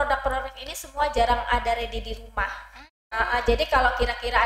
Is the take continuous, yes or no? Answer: yes